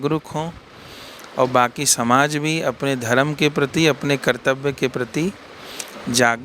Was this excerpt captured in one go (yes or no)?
yes